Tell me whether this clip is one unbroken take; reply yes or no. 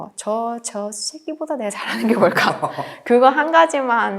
yes